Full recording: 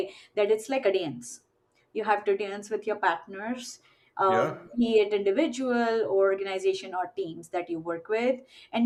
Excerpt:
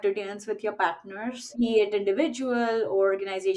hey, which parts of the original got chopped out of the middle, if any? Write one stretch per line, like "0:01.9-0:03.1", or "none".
0:03.7-0:04.6